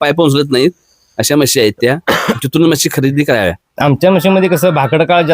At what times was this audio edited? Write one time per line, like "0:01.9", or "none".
0:03.6